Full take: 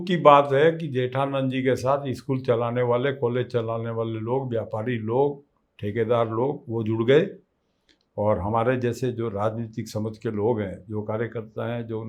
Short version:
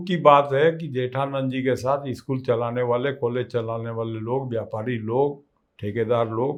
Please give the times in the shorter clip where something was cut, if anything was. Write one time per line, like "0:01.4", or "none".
none